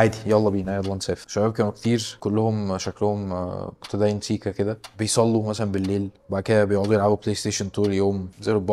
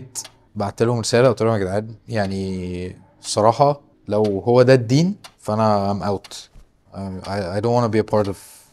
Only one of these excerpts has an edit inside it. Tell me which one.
first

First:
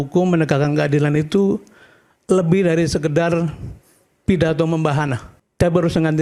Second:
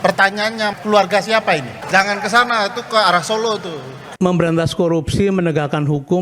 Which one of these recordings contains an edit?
second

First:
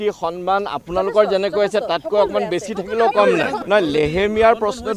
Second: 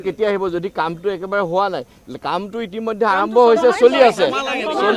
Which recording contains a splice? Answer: first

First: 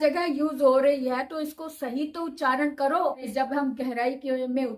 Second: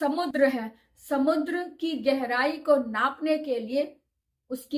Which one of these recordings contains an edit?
first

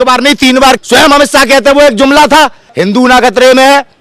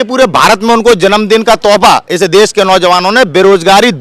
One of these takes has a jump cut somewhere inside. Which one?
first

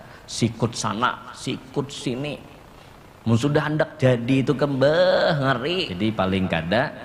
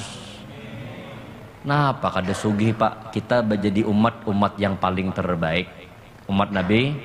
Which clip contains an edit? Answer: first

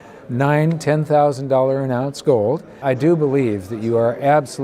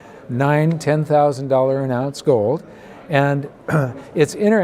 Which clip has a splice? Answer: first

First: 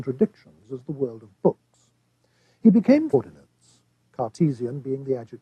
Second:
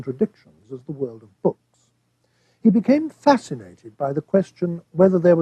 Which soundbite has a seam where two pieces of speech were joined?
second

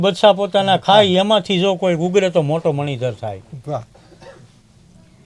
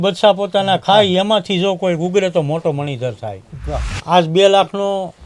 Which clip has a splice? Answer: second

